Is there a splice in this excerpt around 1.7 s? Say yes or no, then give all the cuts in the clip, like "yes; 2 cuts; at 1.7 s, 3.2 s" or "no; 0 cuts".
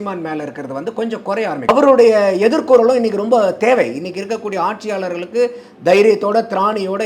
yes; 1 cut; at 1.7 s